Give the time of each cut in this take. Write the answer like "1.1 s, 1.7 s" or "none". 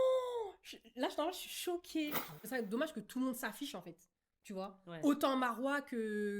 2.4 s